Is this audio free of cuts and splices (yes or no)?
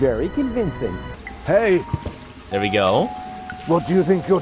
no